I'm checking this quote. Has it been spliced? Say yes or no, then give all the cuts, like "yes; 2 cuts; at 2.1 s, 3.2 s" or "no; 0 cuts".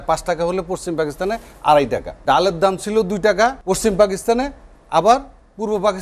yes; 2 cuts; at 2.1 s, 3.6 s